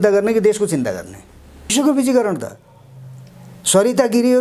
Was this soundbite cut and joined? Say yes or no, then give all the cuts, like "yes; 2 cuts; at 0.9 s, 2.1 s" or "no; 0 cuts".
yes; 1 cut; at 1.7 s